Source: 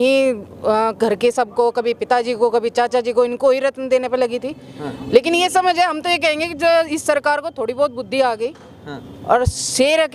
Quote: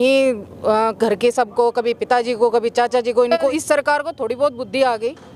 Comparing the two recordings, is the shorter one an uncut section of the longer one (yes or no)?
no